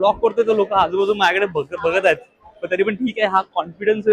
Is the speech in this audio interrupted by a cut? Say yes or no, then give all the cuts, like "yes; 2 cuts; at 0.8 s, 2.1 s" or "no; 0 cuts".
no; 0 cuts